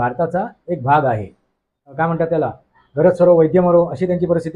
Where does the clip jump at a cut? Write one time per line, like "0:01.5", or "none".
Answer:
0:01.8